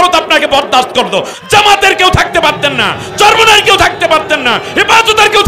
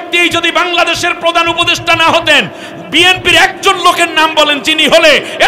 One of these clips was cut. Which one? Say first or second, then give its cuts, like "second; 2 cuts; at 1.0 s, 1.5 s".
first; 1 cut; at 1.4 s